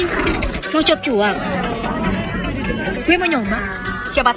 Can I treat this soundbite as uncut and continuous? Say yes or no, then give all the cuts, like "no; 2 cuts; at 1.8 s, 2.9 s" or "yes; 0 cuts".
yes; 0 cuts